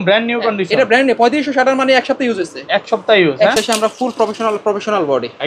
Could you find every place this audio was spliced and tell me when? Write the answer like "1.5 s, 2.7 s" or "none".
3.5 s